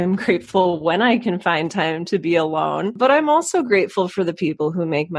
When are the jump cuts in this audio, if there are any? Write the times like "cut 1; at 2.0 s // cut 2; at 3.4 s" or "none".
cut 1; at 2.9 s